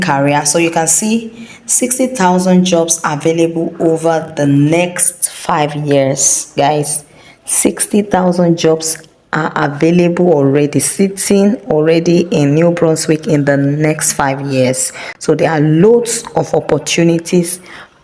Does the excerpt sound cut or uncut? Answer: uncut